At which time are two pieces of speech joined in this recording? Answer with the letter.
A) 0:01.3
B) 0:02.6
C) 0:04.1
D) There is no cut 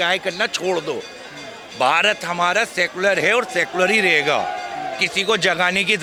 D